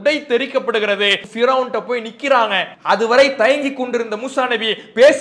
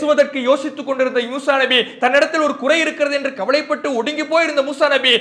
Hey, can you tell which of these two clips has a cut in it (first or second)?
first